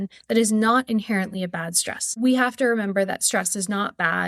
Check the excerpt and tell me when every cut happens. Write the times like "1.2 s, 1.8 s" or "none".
2.1 s